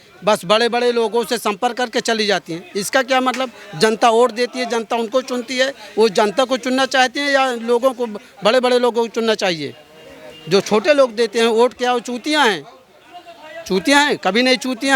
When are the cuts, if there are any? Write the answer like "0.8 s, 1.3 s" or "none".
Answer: none